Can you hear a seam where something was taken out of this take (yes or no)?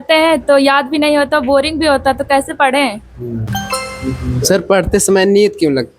yes